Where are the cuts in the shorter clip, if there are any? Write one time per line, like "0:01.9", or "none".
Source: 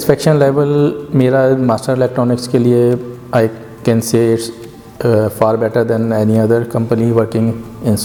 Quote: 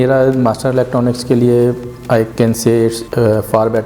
0:02.3
0:03.0